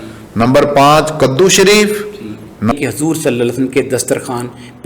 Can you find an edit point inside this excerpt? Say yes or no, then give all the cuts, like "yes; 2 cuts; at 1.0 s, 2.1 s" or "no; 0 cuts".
yes; 1 cut; at 2.7 s